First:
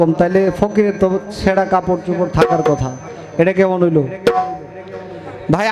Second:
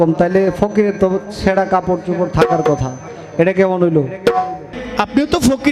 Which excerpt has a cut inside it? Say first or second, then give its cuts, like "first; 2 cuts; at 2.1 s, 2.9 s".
second; 1 cut; at 4.8 s